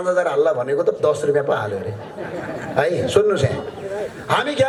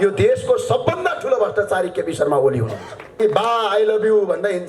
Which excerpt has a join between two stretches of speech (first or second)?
second